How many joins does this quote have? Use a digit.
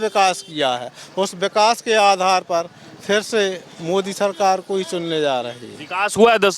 0